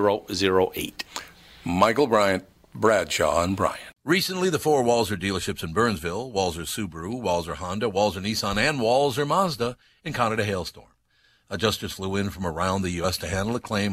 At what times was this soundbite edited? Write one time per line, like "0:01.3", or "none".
0:03.9